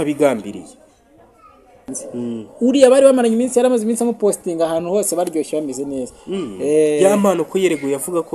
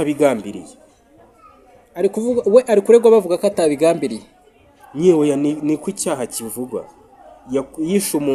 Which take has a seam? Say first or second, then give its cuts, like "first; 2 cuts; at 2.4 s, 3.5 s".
first; 1 cut; at 1.8 s